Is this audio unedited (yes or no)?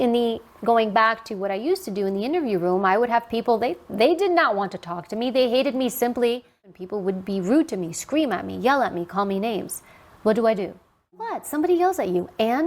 no